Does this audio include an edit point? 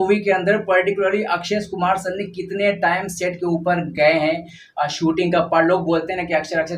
no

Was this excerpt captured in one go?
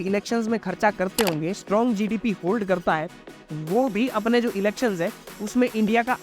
no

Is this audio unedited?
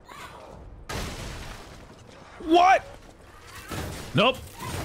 yes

